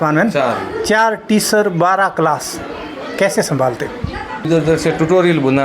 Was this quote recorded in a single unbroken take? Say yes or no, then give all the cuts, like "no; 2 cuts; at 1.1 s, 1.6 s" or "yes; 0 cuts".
no; 1 cut; at 4.5 s